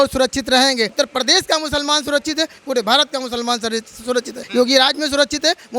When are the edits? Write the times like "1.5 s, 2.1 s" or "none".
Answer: 0.9 s, 4.4 s